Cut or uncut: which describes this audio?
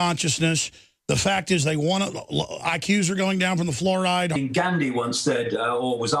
uncut